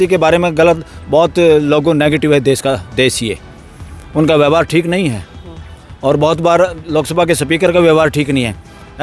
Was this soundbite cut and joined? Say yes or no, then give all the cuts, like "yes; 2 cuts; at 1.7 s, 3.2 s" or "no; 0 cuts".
no; 0 cuts